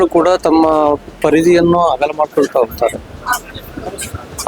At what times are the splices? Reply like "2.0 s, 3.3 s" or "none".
none